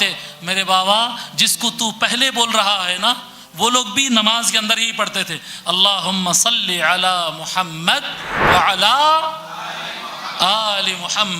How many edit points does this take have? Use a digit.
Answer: 1